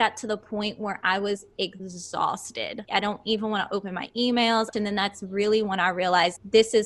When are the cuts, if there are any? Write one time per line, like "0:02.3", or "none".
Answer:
0:01.9
0:02.9
0:04.7